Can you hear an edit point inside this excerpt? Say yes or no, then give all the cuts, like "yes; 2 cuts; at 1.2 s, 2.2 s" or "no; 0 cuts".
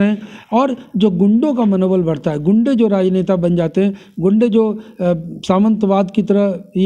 no; 0 cuts